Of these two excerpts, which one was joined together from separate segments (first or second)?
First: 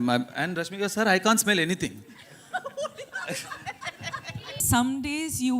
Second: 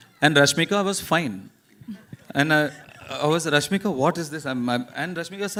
first